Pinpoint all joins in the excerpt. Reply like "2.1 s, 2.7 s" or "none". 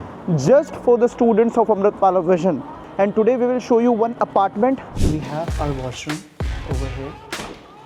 2.8 s, 5.0 s